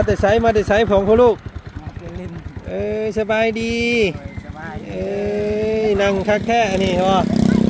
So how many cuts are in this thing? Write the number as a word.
zero